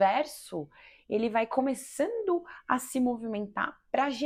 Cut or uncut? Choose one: uncut